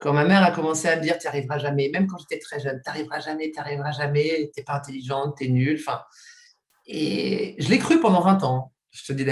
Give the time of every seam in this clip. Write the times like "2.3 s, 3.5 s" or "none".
none